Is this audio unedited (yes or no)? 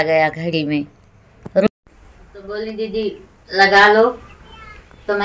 no